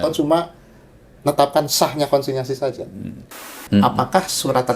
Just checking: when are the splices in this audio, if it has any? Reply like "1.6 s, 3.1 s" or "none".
3.5 s